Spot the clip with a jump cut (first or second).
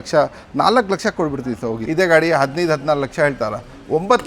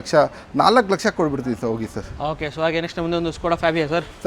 first